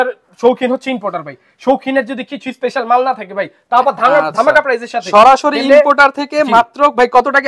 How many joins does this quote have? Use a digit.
0